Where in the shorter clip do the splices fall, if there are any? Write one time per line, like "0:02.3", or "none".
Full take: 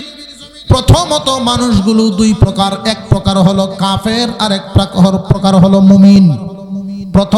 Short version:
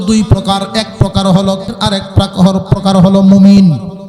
0:01.7